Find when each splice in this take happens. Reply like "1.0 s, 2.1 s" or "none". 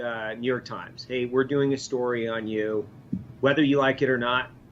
3.0 s